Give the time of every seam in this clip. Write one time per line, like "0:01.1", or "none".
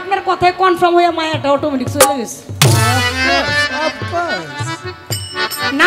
none